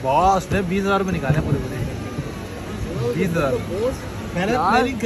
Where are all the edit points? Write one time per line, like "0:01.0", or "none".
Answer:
none